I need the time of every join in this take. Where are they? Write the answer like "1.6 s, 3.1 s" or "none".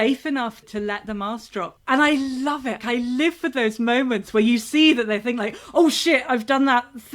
1.7 s, 2.8 s

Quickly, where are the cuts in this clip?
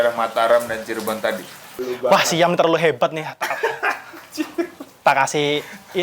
1.8 s

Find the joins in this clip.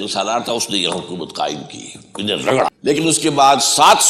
2.7 s

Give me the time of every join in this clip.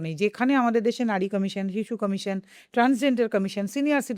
none

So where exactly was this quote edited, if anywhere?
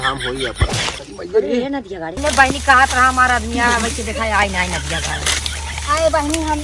2.2 s

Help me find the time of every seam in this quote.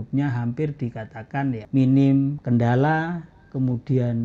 1.6 s, 2.4 s

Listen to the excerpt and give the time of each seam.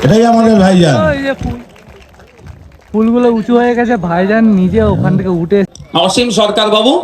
5.7 s

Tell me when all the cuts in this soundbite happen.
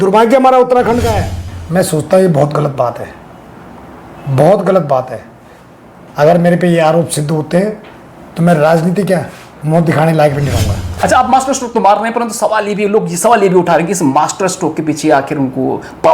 1.6 s, 10.8 s

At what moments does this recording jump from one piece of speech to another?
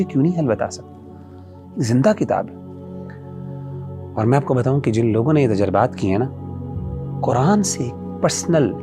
none

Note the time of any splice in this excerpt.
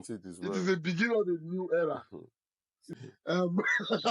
2.8 s

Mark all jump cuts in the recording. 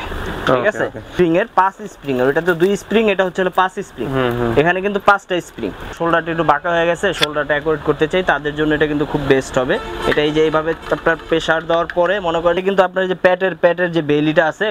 1.0 s, 5.9 s, 12.6 s

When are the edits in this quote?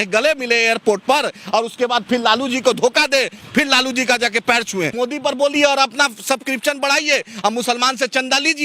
4.9 s

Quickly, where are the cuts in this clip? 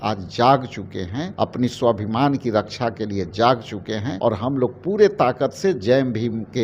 1.2 s, 4.1 s

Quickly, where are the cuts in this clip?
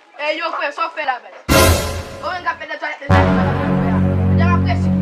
1.0 s

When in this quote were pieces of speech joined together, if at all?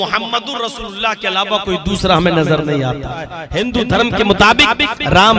3.4 s

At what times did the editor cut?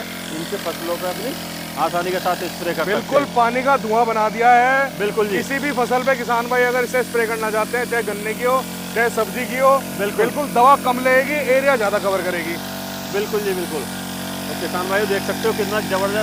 none

